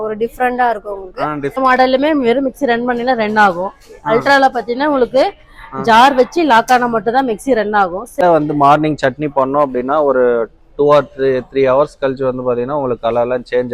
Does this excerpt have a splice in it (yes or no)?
yes